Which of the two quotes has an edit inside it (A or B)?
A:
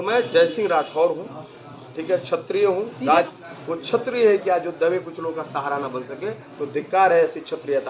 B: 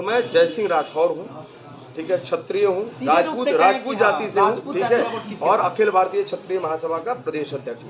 A